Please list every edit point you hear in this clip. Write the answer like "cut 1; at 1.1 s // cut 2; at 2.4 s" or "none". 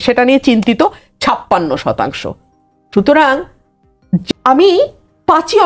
cut 1; at 4.2 s